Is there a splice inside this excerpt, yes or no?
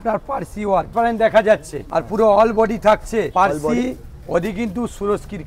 yes